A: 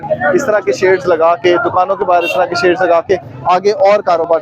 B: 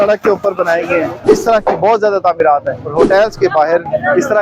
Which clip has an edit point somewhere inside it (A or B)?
B